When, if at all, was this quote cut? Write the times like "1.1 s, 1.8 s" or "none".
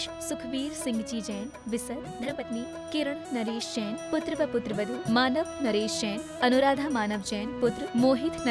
2.2 s